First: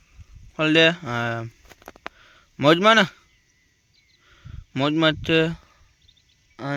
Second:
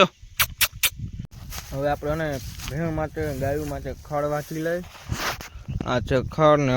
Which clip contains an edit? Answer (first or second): second